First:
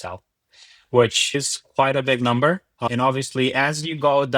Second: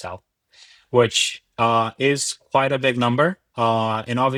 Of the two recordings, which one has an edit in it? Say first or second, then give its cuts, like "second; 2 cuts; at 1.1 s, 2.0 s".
first; 2 cuts; at 1.5 s, 2.8 s